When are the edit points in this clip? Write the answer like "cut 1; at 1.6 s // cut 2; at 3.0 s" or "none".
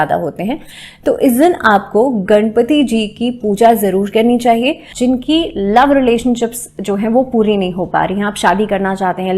cut 1; at 5.1 s